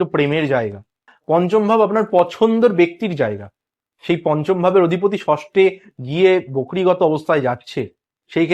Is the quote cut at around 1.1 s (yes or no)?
yes